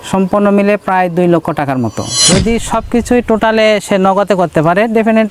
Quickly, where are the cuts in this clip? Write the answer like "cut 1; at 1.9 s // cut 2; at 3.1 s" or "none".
cut 1; at 2.2 s